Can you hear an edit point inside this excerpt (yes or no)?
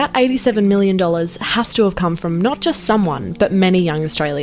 no